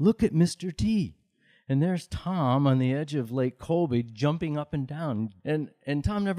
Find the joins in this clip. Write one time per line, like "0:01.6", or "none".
0:01.5
0:05.4